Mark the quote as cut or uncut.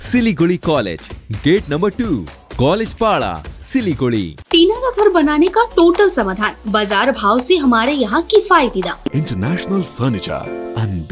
cut